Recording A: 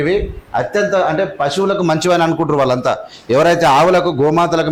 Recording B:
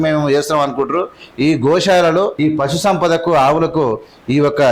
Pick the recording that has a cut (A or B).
B